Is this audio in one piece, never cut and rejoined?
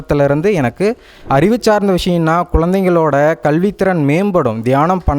no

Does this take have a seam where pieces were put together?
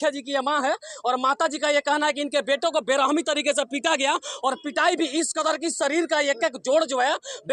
no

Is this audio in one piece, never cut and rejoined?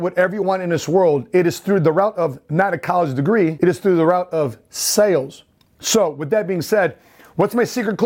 no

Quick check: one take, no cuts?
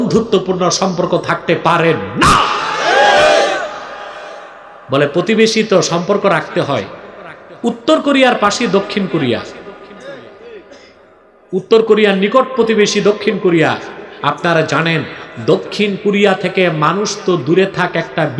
yes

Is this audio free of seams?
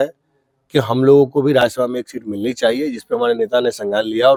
yes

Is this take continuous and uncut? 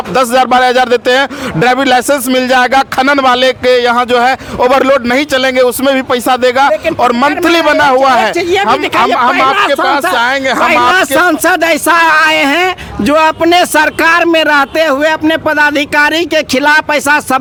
yes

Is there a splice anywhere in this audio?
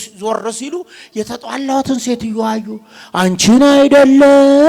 no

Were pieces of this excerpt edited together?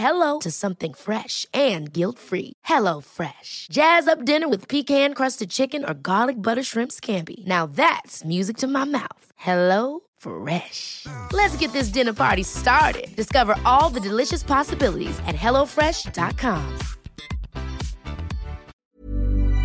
yes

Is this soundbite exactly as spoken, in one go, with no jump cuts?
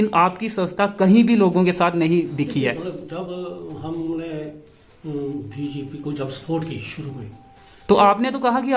yes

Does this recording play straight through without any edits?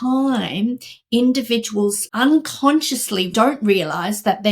no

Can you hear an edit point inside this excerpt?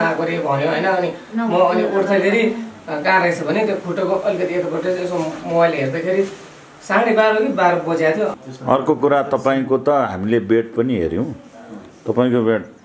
yes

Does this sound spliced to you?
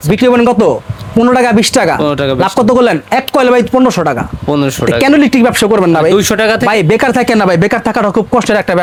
no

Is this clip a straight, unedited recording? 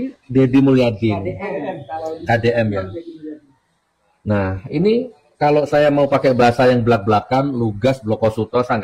yes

